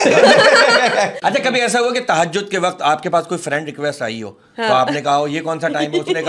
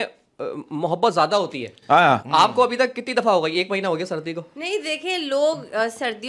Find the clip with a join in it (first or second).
first